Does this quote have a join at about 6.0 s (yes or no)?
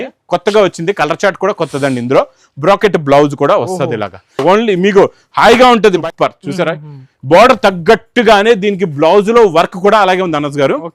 yes